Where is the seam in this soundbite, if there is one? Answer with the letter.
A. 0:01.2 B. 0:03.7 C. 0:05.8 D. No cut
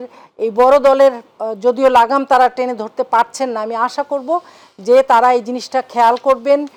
D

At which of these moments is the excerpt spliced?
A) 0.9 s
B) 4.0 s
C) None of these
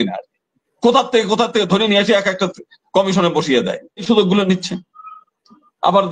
B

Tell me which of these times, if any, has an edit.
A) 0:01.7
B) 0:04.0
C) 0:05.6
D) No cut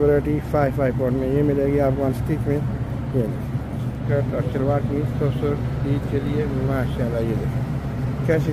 B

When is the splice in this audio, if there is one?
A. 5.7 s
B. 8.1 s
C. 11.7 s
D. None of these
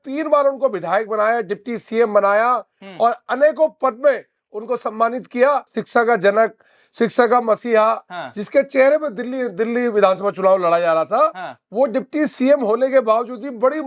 A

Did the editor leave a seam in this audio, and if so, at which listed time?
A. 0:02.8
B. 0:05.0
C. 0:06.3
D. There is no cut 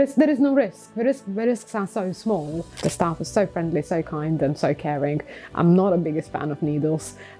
A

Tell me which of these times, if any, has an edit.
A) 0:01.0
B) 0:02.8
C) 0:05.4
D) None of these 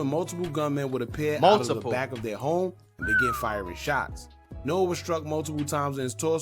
D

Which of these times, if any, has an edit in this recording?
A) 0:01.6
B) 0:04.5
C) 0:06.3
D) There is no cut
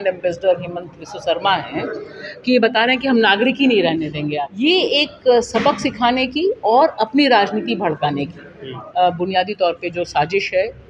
B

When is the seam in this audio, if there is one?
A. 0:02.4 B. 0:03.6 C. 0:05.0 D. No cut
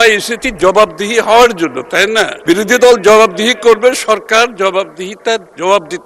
A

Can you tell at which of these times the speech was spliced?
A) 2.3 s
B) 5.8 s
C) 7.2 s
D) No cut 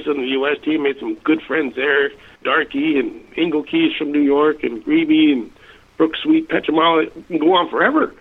A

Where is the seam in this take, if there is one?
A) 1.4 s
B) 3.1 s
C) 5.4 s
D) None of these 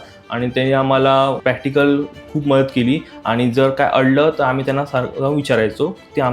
A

